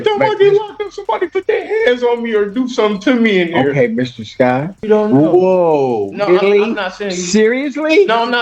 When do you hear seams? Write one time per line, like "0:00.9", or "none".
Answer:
0:04.8